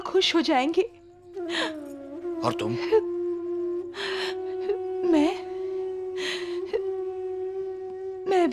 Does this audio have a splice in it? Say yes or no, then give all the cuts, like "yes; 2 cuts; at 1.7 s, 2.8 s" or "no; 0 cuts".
no; 0 cuts